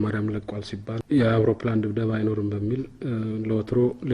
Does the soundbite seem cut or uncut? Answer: cut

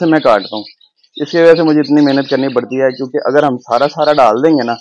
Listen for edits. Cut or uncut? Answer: uncut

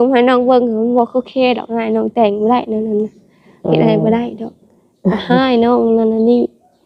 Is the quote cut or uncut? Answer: uncut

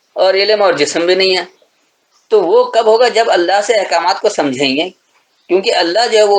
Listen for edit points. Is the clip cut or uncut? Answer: uncut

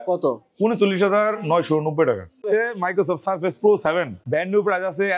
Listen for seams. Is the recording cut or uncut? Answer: cut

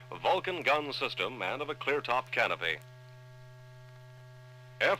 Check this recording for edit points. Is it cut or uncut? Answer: cut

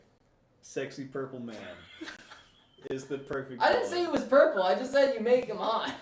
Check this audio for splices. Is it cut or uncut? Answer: uncut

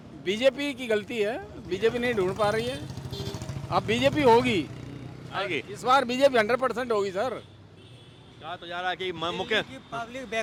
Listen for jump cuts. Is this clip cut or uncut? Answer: uncut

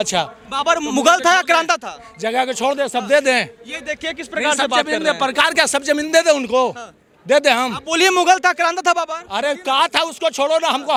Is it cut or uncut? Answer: uncut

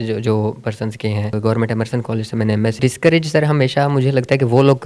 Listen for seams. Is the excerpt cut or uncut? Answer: cut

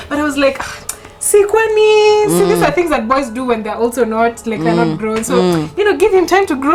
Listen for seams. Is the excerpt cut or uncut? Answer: uncut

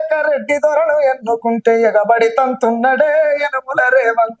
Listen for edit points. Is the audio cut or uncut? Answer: uncut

